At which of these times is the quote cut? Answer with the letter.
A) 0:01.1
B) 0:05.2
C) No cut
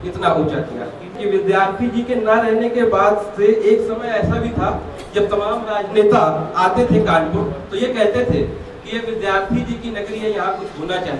A